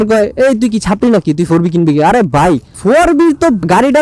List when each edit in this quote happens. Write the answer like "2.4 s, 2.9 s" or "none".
none